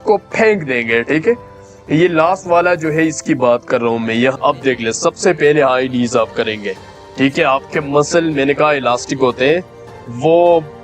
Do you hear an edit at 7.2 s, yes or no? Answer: no